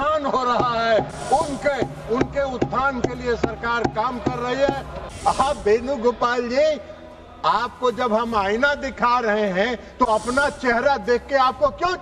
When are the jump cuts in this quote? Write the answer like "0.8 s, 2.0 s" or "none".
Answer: 4.9 s